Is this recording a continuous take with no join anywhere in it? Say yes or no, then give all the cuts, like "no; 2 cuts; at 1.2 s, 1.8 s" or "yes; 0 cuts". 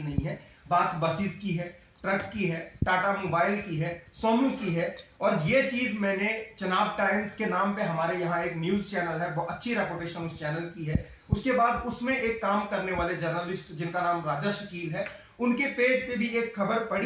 yes; 0 cuts